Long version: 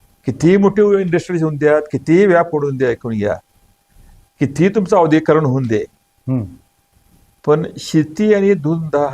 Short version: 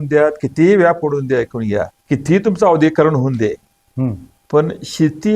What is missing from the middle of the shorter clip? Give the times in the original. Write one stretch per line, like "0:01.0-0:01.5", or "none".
0:03.5-0:04.3
0:06.6-0:07.2